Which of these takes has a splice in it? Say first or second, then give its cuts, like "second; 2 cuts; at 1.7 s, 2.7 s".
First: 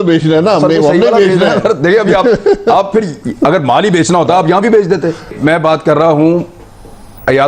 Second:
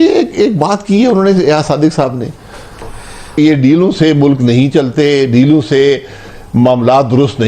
second; 1 cut; at 3.2 s